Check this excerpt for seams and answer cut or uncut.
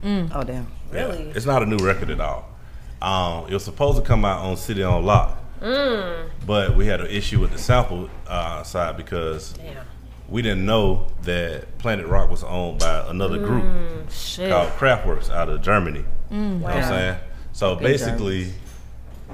uncut